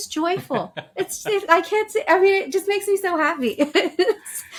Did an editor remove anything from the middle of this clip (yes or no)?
no